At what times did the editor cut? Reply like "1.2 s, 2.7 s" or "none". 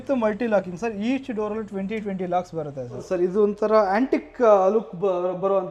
3.0 s

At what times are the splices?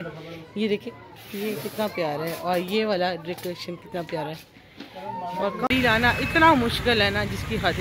5.7 s

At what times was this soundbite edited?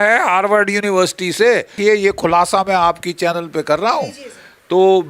1.8 s

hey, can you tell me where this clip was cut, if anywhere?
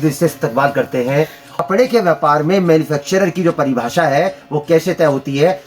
1.5 s

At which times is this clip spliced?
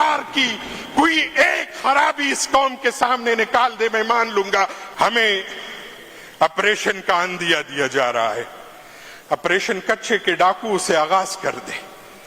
4.8 s

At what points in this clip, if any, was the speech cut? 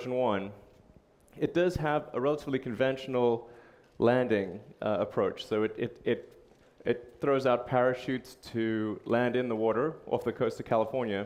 none

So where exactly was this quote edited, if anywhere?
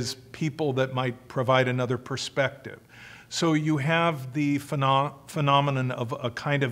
none

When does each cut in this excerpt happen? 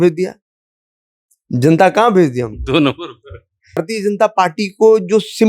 3.8 s

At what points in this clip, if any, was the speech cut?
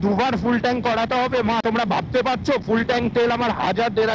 1.6 s

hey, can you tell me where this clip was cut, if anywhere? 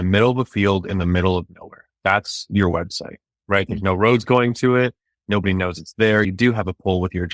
none

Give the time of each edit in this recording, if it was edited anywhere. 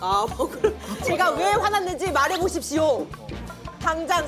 1.0 s

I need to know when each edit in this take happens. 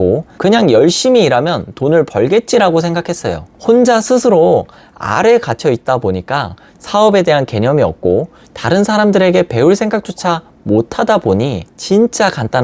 11.6 s

